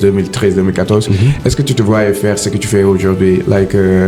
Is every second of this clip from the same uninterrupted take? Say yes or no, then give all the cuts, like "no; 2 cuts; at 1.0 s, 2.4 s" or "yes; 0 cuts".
yes; 0 cuts